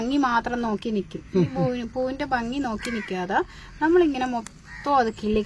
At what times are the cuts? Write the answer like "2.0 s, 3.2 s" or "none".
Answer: none